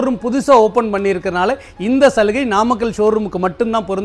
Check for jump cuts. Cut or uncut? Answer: uncut